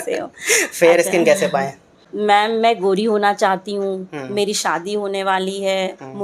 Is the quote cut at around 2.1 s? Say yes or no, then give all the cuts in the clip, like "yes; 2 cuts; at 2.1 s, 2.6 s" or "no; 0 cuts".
yes; 1 cut; at 2.1 s